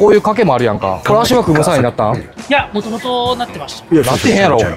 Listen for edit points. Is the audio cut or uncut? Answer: cut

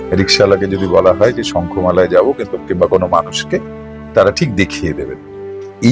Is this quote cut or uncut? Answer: uncut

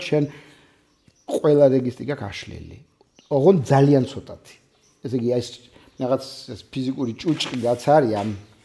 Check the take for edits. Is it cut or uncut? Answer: uncut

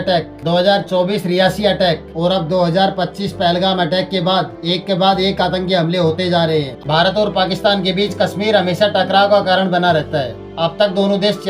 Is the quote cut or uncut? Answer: cut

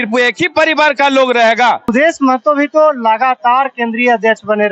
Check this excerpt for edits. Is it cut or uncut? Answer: cut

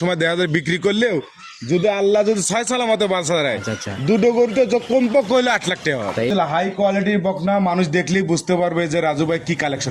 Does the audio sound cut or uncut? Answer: cut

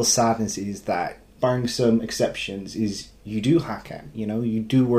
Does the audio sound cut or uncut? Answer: cut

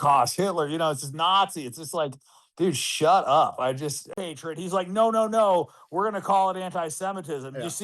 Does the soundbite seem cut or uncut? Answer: cut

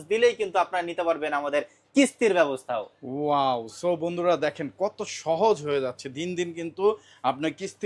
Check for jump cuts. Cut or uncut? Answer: uncut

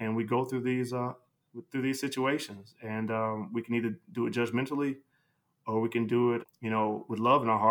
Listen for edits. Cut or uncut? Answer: cut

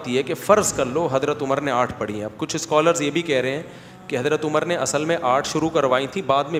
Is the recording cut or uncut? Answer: uncut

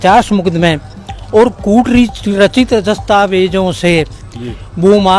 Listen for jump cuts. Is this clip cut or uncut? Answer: uncut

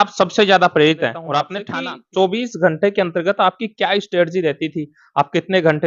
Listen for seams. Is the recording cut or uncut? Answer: cut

